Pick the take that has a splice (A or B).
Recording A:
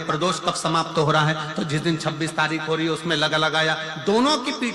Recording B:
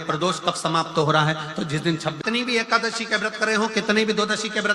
B